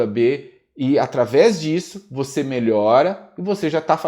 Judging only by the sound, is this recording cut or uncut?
uncut